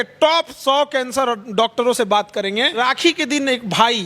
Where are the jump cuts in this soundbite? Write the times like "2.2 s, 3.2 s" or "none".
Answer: 2.8 s